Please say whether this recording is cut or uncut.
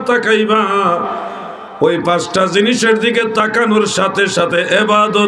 uncut